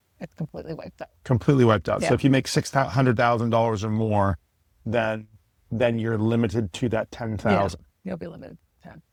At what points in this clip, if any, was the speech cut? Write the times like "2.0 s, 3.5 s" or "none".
none